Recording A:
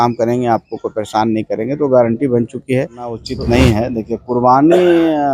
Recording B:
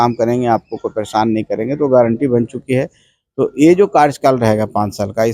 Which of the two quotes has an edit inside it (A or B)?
A